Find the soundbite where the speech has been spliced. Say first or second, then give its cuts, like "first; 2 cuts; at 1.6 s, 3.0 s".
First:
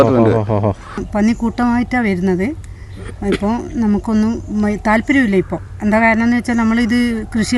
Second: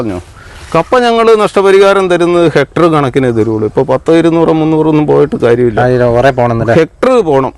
first; 1 cut; at 1.0 s